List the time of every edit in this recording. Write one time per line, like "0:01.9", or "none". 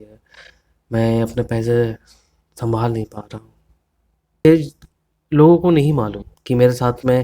0:04.4